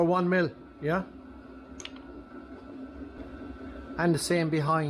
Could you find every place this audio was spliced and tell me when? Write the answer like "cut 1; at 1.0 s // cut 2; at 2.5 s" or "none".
cut 1; at 3.2 s